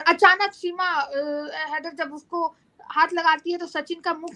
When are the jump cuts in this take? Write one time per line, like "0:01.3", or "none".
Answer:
none